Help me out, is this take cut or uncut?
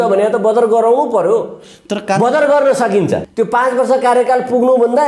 cut